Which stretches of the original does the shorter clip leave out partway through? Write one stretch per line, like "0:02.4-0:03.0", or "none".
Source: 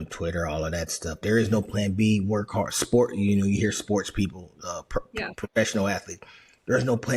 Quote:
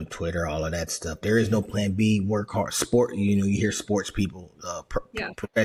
none